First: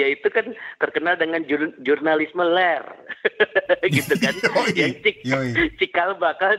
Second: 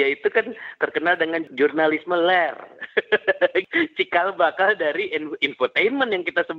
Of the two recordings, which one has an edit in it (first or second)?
second